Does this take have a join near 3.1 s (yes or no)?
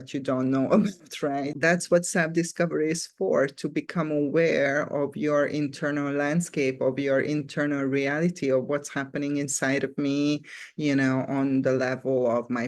no